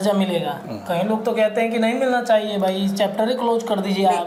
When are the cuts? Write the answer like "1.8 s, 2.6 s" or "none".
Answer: none

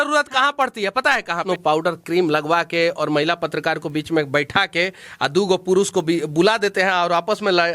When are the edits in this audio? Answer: 1.4 s

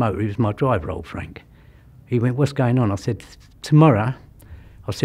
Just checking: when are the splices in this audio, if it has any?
none

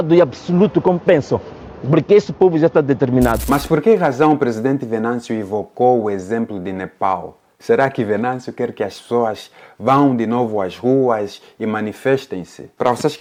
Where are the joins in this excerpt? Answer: none

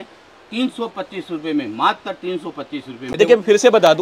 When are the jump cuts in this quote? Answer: 3.0 s

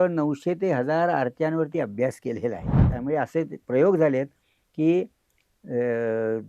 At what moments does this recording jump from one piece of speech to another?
2.9 s

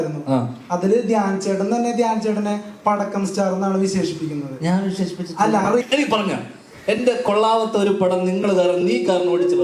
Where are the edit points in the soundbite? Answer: 5.8 s

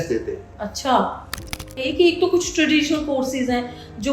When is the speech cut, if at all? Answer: 1.8 s

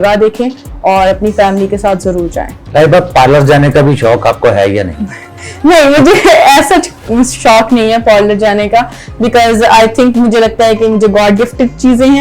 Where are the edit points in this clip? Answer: 2.6 s

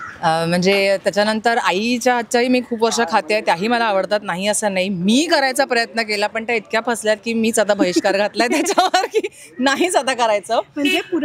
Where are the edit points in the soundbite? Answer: none

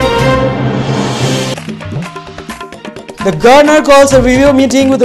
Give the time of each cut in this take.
1.4 s

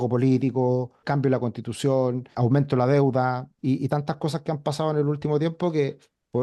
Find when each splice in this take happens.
1.0 s, 2.3 s, 3.5 s

